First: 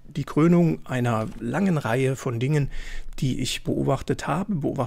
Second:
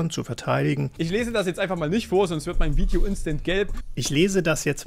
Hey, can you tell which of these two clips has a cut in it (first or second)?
second